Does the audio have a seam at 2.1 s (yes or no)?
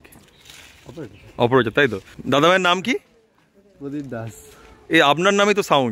yes